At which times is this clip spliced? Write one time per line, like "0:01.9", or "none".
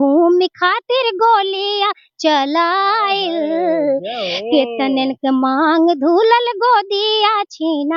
none